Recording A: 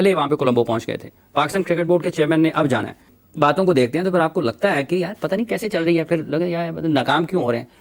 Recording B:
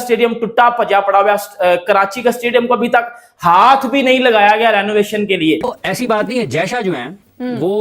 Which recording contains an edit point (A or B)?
B